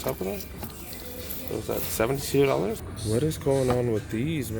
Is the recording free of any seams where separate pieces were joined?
no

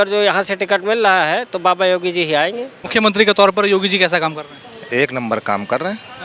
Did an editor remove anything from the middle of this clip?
yes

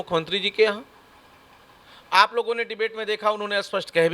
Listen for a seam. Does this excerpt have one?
no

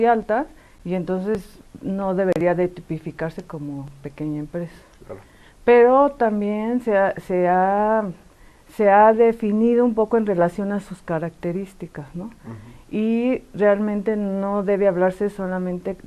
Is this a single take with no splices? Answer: no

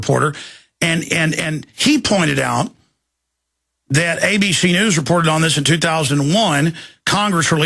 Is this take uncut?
no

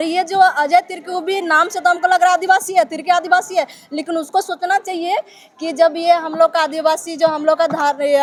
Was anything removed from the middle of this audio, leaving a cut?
no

